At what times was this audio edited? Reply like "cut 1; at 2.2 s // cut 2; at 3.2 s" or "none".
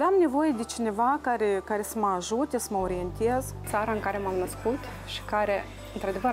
cut 1; at 3.6 s